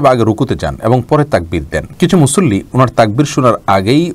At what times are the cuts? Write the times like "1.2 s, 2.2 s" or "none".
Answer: 1.8 s